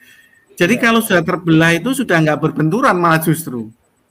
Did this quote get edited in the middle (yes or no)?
no